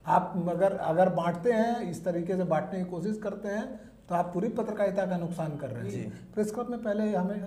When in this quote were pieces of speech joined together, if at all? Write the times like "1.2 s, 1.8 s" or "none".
5.8 s